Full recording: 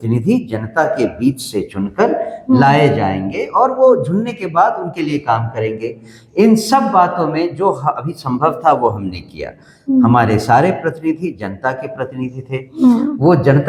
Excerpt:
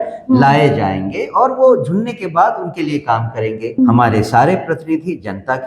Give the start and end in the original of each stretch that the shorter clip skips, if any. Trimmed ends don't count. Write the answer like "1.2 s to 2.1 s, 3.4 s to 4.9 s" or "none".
6.0 s to 9.9 s